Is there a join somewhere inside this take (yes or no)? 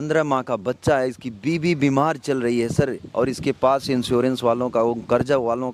no